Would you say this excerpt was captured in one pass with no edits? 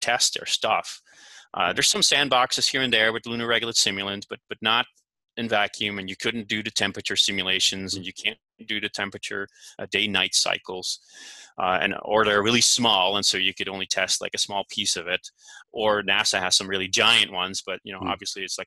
yes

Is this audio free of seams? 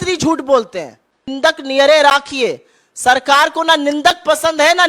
no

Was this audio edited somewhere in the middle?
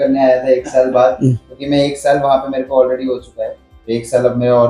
no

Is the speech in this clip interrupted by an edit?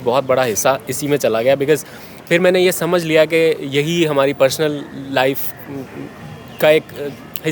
no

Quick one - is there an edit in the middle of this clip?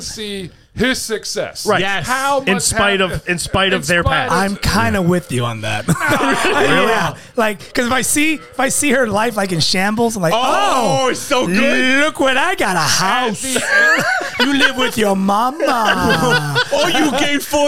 no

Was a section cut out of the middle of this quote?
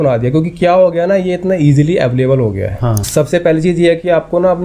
yes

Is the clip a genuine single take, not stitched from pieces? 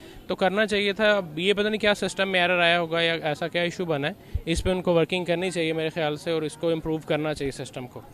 yes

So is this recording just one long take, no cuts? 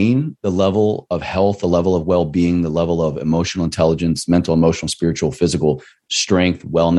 yes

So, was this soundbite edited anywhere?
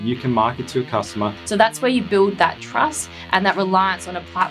yes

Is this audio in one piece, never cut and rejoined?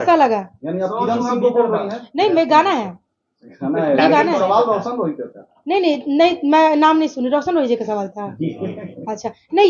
yes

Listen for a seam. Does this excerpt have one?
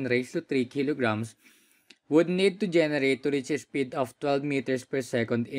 no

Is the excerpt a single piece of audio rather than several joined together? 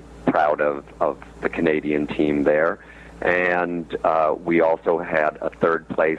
yes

